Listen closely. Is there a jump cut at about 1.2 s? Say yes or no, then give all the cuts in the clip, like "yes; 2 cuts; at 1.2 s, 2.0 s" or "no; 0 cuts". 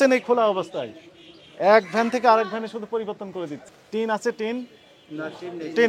no; 1 cut; at 3.5 s